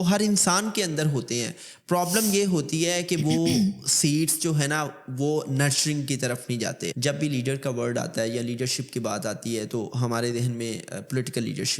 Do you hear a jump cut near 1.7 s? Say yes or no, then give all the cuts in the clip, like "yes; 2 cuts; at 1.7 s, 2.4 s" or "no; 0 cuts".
no; 1 cut; at 6.9 s